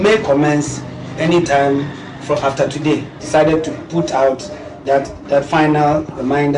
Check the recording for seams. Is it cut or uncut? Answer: cut